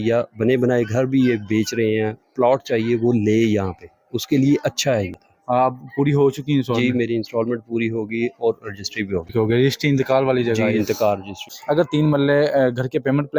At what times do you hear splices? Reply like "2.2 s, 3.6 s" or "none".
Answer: 5.2 s, 9.3 s, 11.5 s